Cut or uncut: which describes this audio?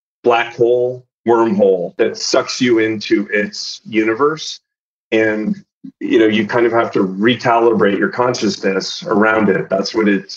cut